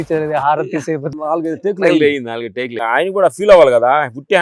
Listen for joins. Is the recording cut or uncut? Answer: cut